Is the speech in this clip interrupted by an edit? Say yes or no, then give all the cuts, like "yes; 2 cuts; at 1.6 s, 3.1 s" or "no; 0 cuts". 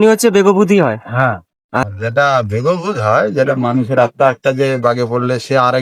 yes; 1 cut; at 1.9 s